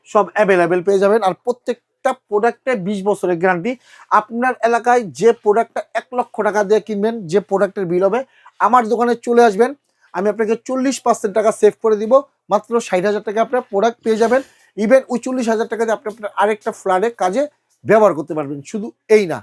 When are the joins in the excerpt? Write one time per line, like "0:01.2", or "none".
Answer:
none